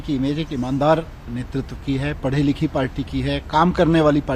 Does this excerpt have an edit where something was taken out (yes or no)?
no